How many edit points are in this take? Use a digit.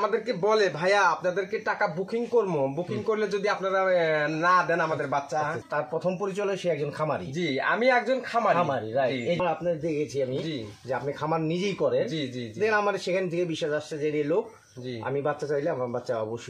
2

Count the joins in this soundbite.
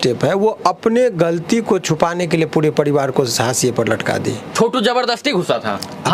1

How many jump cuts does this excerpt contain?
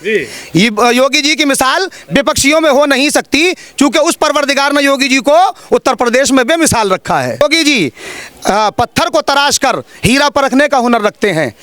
1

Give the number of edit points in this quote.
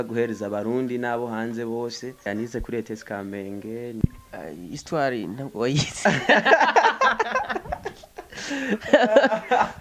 2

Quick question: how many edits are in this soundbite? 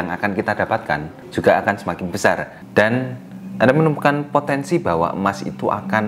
1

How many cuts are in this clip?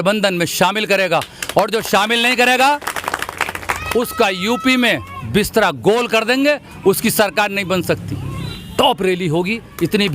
1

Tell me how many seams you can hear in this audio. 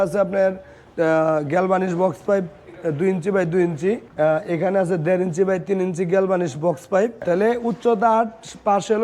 2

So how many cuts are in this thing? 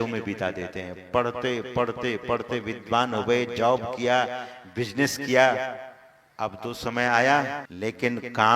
1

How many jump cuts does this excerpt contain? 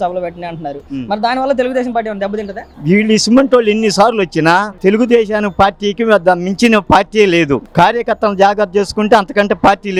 0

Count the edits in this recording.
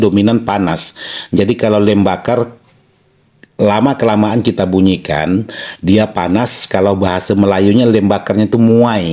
0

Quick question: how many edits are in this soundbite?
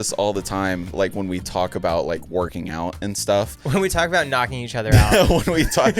1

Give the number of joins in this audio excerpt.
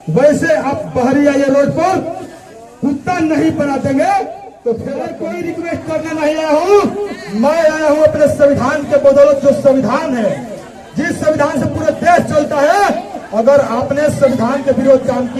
1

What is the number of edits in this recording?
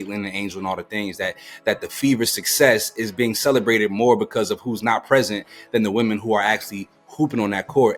0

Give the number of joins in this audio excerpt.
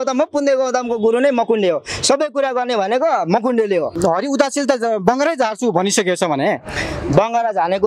1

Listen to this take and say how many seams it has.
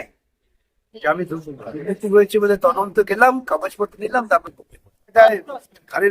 1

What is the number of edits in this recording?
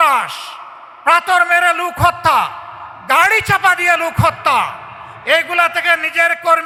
0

